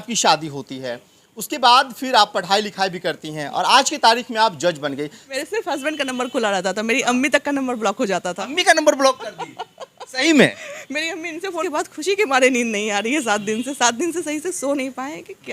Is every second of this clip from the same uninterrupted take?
no; 2 cuts; at 5.3 s, 11.6 s

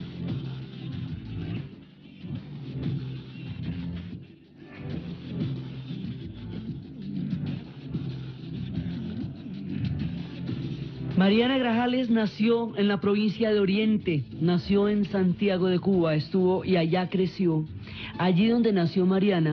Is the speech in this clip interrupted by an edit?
no; 0 cuts

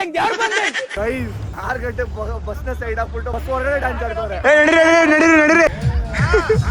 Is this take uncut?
no; 3 cuts; at 0.9 s, 4.4 s, 5.7 s

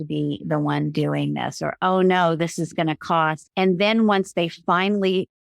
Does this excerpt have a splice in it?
yes; 1 cut; at 3.4 s

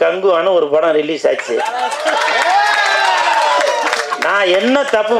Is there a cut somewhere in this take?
no; 0 cuts

